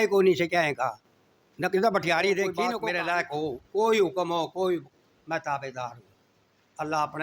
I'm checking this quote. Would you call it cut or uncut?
cut